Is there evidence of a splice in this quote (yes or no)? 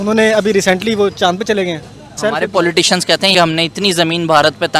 yes